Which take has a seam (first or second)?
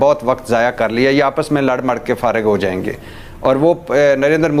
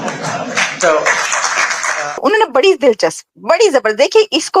second